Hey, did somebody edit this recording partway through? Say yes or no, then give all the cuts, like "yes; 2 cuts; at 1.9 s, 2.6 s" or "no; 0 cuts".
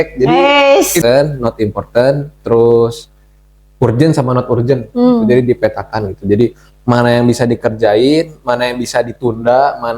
yes; 1 cut; at 1.0 s